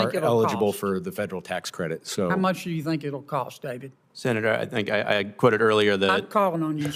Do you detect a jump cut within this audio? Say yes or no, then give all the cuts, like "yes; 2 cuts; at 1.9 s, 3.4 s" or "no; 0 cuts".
no; 0 cuts